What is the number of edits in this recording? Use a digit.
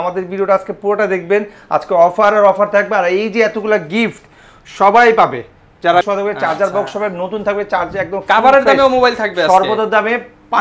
1